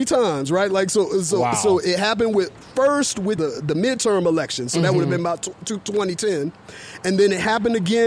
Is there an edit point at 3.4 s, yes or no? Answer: yes